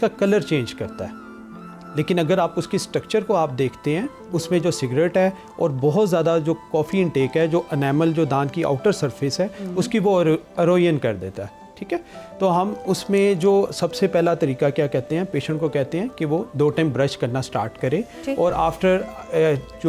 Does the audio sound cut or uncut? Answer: uncut